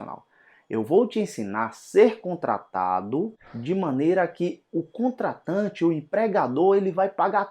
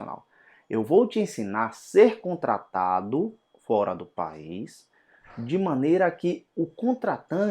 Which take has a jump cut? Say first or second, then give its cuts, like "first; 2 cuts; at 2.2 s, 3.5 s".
first; 1 cut; at 3.5 s